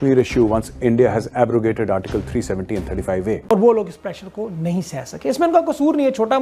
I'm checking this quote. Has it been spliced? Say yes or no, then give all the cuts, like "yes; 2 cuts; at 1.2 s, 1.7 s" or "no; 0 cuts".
yes; 1 cut; at 3.5 s